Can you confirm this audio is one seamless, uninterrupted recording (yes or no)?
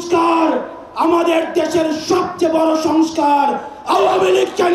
yes